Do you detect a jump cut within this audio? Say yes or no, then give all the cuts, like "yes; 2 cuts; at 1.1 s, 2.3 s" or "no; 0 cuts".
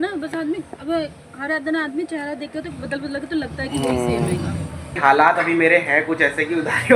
yes; 1 cut; at 5.0 s